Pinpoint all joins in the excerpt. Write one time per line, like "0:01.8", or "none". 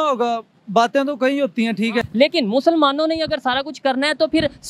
0:02.1